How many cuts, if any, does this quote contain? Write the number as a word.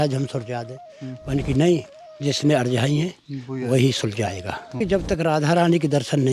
one